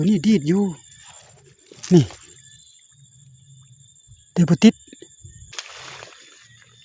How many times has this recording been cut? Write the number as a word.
one